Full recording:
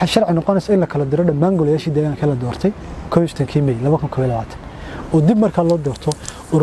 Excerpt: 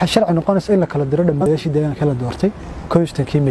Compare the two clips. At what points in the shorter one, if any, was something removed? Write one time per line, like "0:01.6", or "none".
0:01.4